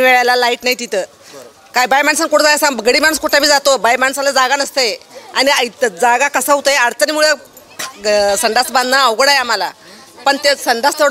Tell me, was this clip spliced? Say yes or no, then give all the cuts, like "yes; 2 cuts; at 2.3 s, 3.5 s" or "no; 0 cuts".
no; 0 cuts